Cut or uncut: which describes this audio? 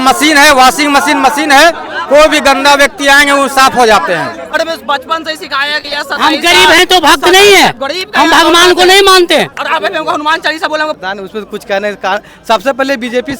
cut